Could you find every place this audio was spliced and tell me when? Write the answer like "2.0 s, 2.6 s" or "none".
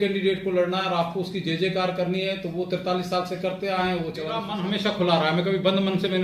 4.5 s